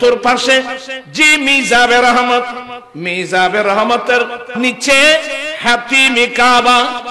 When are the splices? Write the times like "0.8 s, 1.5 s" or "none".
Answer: 4.5 s